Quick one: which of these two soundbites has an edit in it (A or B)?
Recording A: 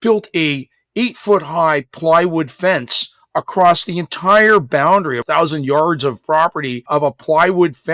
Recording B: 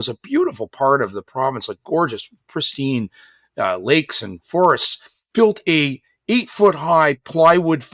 A